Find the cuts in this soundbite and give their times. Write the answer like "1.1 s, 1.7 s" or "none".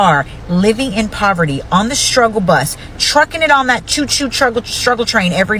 none